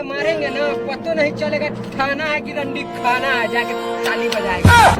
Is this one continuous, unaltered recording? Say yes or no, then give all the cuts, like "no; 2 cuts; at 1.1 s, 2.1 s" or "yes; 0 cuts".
yes; 0 cuts